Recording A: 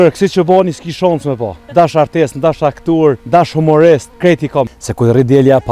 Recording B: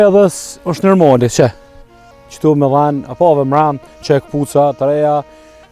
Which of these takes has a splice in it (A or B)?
A